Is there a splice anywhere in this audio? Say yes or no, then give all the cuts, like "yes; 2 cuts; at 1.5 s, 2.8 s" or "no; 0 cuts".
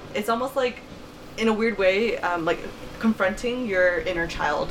no; 0 cuts